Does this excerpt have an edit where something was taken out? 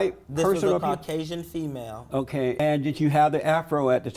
yes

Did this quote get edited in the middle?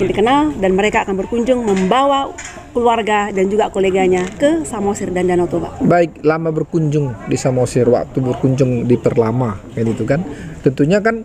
no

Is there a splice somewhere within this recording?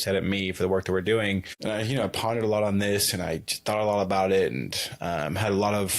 yes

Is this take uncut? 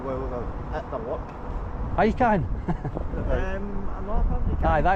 yes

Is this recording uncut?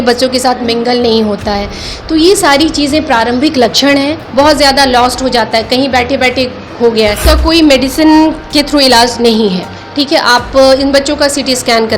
no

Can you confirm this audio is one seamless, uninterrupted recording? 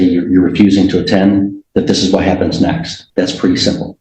no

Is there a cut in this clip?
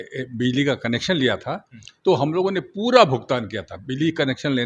no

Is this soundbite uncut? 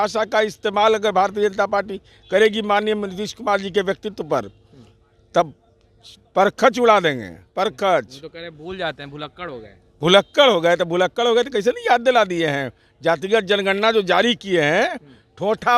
yes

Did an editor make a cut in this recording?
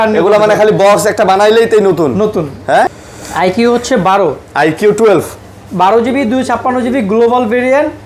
yes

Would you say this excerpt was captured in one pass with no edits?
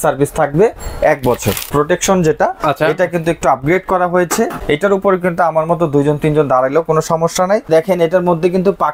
no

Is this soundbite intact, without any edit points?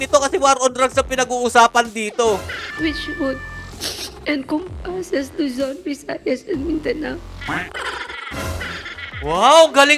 no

